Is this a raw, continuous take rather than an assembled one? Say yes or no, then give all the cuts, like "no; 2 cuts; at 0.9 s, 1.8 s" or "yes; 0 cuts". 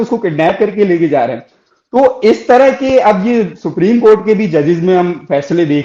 yes; 0 cuts